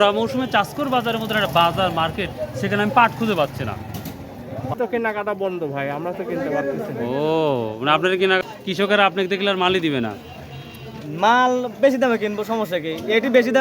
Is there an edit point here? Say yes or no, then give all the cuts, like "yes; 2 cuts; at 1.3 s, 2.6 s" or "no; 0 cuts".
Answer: yes; 2 cuts; at 4.7 s, 8.4 s